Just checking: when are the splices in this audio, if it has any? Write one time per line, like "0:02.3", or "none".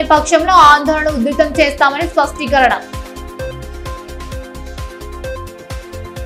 none